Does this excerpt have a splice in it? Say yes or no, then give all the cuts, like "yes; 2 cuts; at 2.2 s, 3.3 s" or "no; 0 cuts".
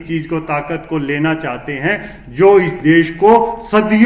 no; 0 cuts